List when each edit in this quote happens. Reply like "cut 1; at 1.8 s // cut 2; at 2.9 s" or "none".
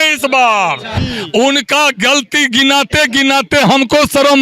cut 1; at 0.9 s